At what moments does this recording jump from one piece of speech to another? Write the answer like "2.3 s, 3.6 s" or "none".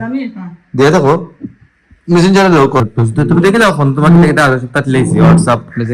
2.8 s